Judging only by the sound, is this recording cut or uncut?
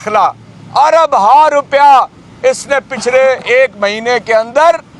uncut